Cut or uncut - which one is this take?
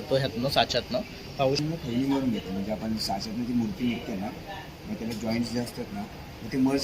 cut